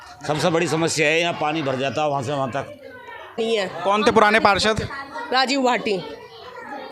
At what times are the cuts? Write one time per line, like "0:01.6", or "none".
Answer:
0:03.4